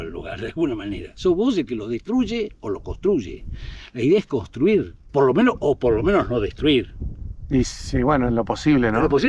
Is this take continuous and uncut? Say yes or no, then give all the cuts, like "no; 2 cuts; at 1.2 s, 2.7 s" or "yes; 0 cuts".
yes; 0 cuts